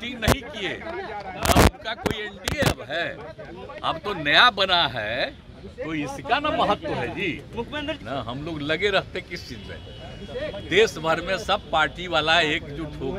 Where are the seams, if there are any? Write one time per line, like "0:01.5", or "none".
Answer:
none